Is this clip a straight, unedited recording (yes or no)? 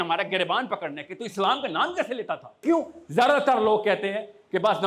no